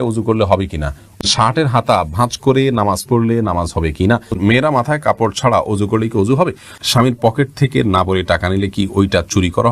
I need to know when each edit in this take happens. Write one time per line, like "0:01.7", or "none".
0:01.2
0:04.4
0:06.8